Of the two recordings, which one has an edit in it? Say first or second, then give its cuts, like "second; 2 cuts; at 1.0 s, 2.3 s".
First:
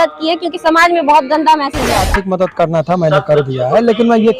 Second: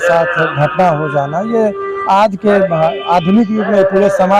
first; 1 cut; at 2.0 s